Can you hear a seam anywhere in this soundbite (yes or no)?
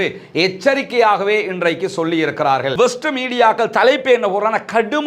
yes